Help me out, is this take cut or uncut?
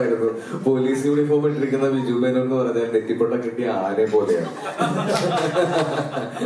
uncut